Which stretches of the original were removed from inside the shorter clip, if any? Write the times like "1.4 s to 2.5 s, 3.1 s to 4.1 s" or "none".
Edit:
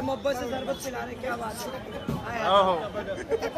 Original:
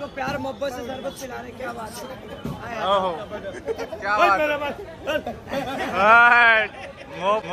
none